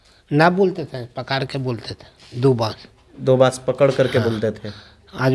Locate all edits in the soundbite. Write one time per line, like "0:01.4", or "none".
none